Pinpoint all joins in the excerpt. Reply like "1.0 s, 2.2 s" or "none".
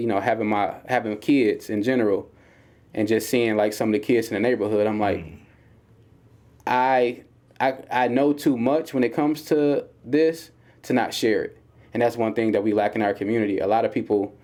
none